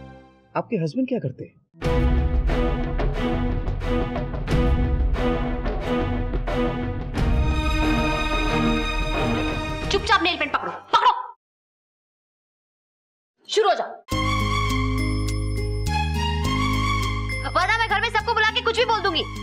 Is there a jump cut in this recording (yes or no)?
yes